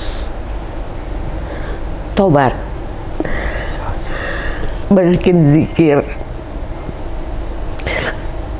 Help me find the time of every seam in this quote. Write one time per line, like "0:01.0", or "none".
0:04.8